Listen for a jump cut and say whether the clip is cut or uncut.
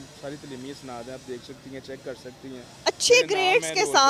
uncut